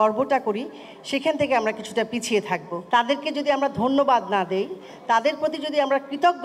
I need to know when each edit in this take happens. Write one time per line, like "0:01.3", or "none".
0:02.7